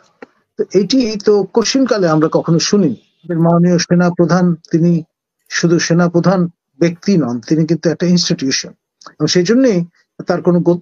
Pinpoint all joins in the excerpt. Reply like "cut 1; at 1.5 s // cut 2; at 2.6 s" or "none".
cut 1; at 3.3 s